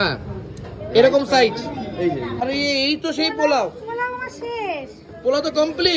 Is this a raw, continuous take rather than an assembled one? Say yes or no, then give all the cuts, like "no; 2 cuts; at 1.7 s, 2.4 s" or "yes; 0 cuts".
no; 1 cut; at 2.4 s